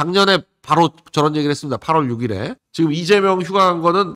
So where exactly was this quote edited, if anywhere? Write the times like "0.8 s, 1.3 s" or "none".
2.6 s